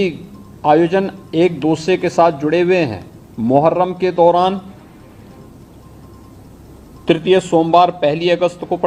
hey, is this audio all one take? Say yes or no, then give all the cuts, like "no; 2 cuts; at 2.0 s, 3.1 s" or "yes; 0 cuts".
yes; 0 cuts